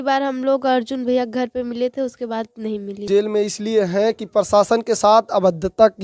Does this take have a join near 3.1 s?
yes; 1 cut; at 3.1 s

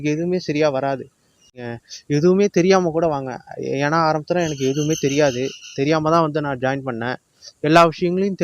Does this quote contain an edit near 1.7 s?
yes; 1 cut; at 1.7 s

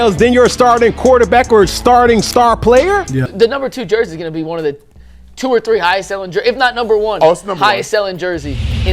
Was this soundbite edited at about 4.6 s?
no; 1 cut; at 3.2 s

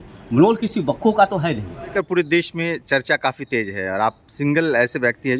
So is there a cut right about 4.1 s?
no; 1 cut; at 1.9 s

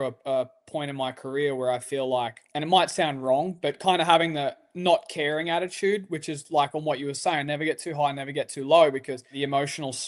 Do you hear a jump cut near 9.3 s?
yes; 2 cuts; at 2.4 s, 9.3 s

